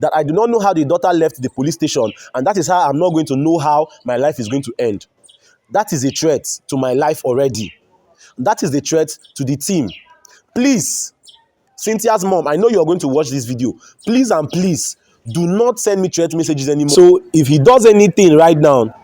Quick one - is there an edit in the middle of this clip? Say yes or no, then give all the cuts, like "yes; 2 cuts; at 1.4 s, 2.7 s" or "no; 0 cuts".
yes; 1 cut; at 16.9 s